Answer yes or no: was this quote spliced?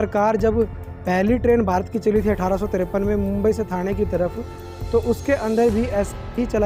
no